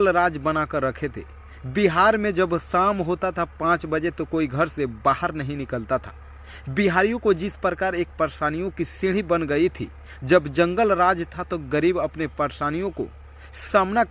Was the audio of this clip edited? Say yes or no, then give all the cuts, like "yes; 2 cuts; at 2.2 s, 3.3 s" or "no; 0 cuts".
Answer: no; 0 cuts